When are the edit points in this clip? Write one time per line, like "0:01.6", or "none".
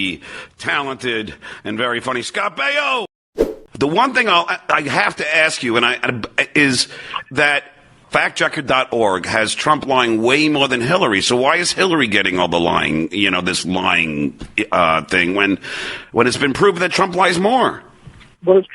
0:03.5